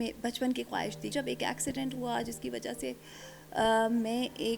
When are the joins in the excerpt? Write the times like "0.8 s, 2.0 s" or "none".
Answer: 1.1 s